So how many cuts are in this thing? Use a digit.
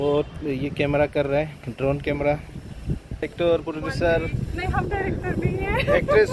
1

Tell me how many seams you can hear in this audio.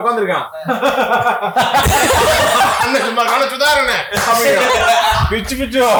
0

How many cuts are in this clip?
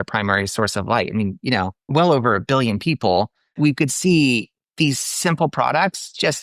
2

